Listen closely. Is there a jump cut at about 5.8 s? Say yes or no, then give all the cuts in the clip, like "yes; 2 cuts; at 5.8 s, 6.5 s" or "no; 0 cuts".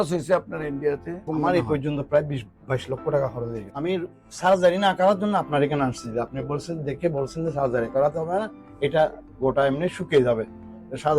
no; 2 cuts; at 1.2 s, 3.6 s